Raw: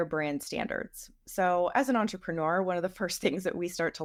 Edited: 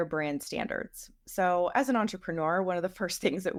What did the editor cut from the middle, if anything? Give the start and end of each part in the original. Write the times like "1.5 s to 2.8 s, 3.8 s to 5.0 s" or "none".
none